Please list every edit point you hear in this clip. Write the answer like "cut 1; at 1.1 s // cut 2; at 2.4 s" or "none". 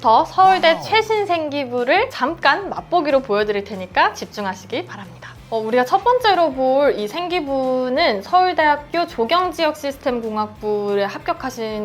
none